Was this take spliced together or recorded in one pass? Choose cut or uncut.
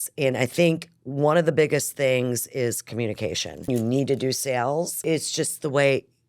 cut